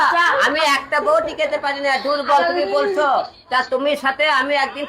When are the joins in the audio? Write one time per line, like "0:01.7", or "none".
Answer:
none